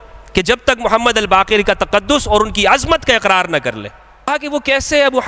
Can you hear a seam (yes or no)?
yes